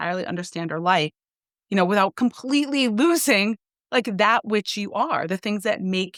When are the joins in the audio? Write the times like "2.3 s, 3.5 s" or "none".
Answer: none